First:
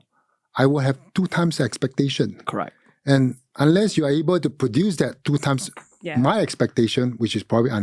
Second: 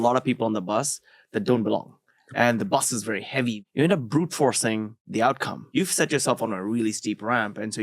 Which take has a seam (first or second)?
second